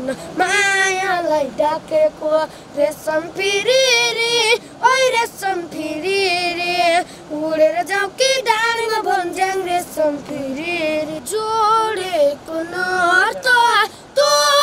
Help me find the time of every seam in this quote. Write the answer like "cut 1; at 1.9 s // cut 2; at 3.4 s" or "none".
cut 1; at 11.2 s